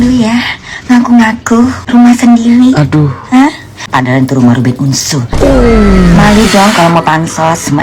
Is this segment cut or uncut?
cut